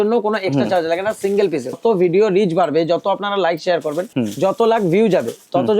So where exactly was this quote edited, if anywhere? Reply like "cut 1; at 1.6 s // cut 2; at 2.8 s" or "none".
cut 1; at 1.8 s // cut 2; at 4.1 s